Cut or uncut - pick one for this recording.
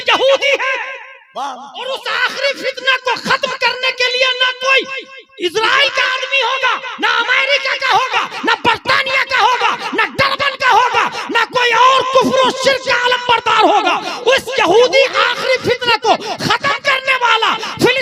uncut